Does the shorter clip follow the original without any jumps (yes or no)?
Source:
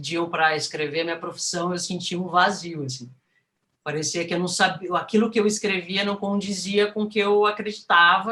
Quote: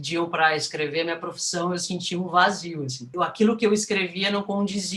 no